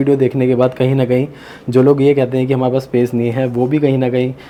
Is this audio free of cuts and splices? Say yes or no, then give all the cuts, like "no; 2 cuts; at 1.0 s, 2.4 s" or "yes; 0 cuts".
yes; 0 cuts